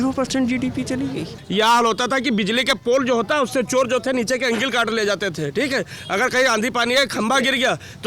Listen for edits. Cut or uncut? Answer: cut